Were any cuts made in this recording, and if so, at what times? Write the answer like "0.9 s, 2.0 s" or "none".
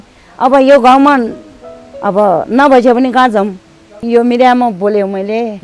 4.0 s